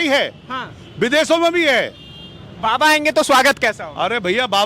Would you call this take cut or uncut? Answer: uncut